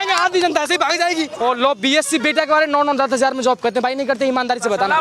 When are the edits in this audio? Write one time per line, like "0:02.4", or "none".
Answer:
0:01.3